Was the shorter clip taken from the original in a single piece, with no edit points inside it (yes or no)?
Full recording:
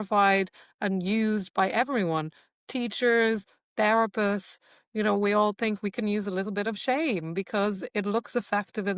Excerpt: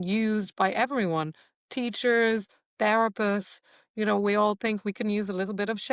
yes